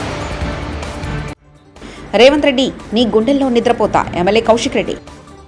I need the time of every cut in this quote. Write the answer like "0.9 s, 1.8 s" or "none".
none